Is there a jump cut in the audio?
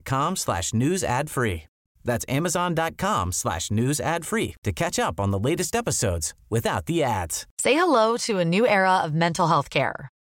yes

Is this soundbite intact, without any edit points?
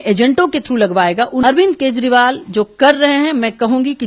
no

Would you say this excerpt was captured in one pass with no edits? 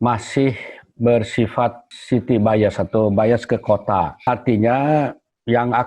no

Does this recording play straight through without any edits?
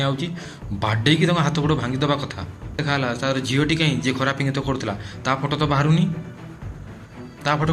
no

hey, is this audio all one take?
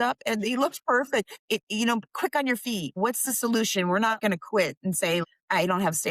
no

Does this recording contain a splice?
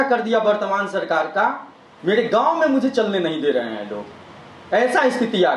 no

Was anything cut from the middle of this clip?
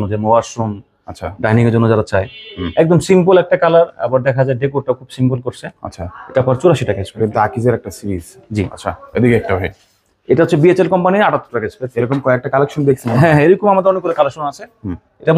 no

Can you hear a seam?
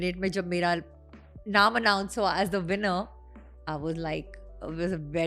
no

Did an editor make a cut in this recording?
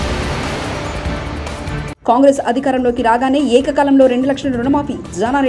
yes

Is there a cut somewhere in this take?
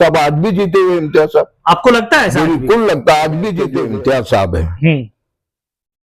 yes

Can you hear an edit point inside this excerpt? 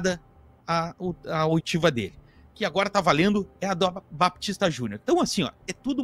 no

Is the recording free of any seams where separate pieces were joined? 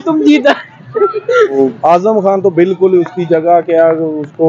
no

